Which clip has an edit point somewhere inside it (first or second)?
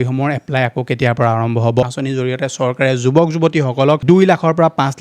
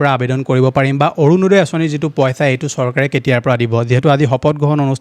first